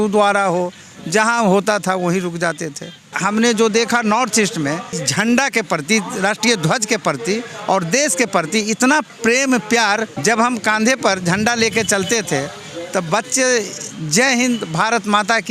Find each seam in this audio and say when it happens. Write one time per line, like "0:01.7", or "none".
0:03.1
0:04.9
0:09.1
0:10.1